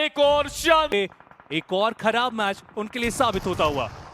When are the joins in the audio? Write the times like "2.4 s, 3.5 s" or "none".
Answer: 0.9 s